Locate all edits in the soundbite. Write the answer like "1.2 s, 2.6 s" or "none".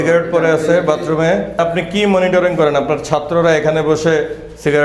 1.6 s